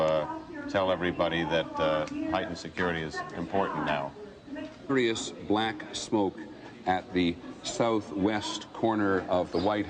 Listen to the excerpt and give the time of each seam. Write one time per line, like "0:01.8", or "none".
none